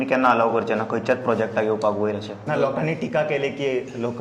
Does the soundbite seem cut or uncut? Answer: cut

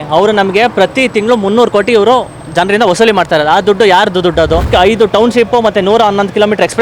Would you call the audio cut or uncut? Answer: cut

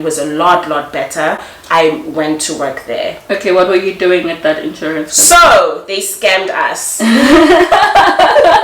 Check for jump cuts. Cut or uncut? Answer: uncut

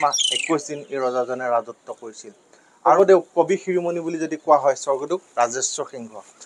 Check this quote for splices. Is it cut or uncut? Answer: cut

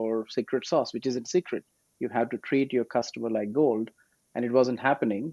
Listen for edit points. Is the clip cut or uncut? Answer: uncut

